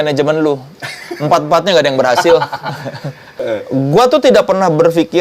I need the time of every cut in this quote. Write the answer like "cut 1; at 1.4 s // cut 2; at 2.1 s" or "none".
cut 1; at 3.4 s

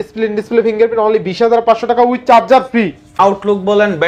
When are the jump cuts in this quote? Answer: cut 1; at 3.2 s

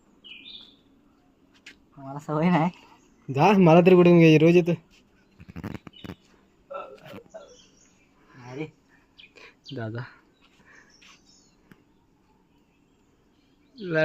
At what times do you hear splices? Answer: cut 1; at 9.6 s

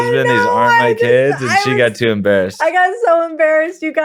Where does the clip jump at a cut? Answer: none

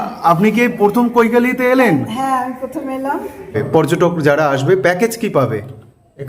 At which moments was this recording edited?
cut 1; at 3.6 s

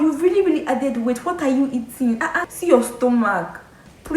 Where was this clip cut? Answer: cut 1; at 2.4 s

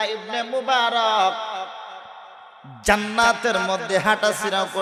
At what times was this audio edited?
none

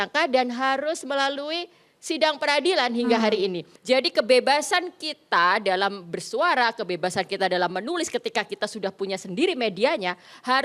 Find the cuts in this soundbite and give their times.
cut 1; at 3.7 s

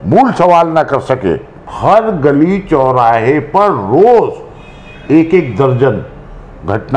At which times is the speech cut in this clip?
cut 1; at 1.6 s

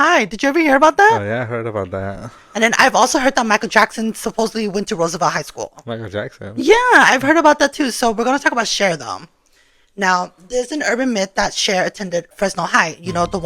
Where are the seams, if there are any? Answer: cut 1; at 12.3 s

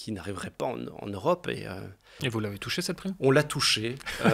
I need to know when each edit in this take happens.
cut 1; at 2.1 s

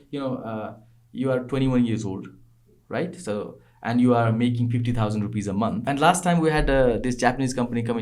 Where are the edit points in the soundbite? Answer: cut 1; at 5.8 s

